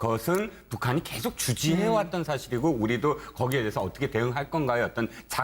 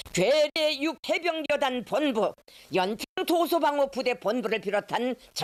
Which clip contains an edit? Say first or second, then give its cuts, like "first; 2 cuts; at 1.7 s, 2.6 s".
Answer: first; 1 cut; at 1.9 s